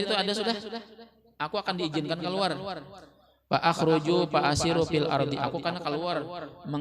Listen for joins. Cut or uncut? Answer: uncut